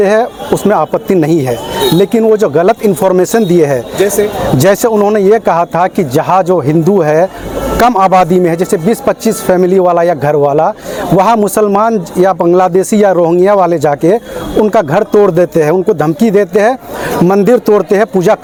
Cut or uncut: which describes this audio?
uncut